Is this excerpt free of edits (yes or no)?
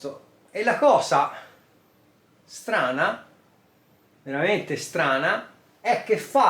yes